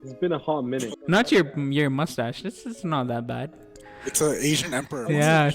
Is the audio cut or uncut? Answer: cut